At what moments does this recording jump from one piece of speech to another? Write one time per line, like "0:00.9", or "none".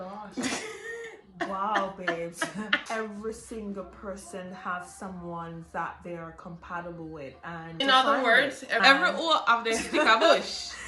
0:02.8
0:07.8
0:08.8